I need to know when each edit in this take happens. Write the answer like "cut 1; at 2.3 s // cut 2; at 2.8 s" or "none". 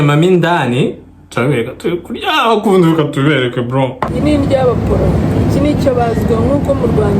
cut 1; at 4.1 s